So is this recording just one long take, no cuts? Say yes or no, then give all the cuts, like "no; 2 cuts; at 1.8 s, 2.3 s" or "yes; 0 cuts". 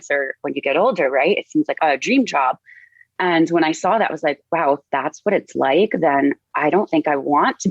no; 1 cut; at 1.8 s